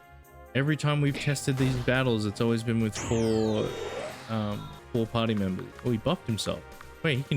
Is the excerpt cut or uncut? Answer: cut